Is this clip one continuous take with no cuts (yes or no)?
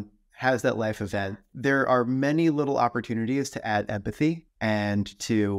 no